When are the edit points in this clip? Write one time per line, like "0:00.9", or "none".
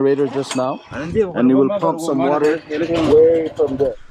none